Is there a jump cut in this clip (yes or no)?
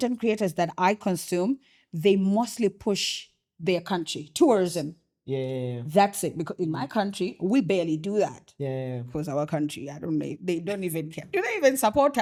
no